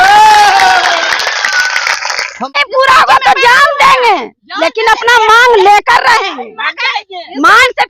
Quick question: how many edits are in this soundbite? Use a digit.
1